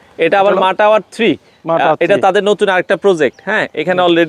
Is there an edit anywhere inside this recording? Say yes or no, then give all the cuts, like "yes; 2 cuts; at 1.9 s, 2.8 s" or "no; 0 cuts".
no; 0 cuts